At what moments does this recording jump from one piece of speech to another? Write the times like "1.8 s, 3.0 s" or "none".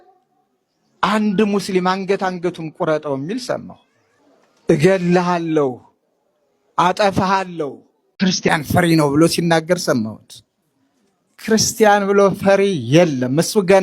8.1 s